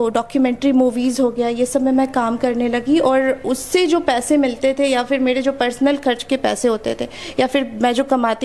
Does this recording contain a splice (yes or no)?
no